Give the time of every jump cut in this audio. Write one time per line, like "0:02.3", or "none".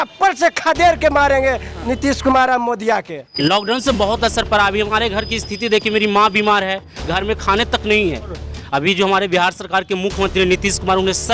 0:03.3
0:08.4